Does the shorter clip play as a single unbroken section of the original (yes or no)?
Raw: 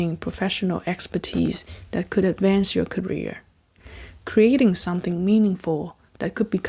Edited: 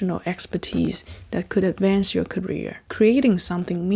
no